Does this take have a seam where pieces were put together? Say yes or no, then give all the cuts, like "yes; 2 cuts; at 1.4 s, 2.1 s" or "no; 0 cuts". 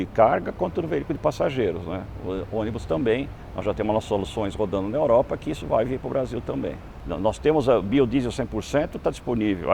no; 0 cuts